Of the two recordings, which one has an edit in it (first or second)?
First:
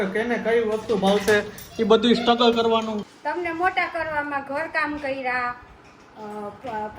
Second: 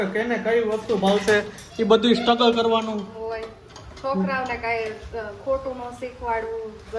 first